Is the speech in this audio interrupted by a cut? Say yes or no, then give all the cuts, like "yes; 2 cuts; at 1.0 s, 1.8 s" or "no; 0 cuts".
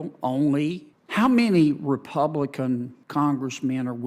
yes; 2 cuts; at 0.9 s, 3.0 s